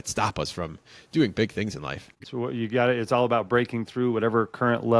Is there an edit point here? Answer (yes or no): yes